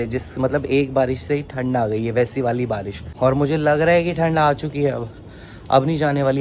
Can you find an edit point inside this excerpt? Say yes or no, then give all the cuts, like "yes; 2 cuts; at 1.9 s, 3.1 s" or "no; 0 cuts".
no; 0 cuts